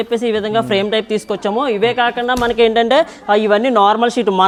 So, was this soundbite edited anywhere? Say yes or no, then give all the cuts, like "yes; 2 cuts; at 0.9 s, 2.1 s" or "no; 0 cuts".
no; 0 cuts